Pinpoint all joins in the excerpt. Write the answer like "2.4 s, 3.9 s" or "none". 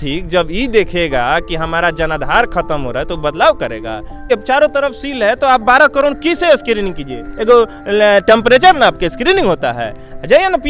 4.3 s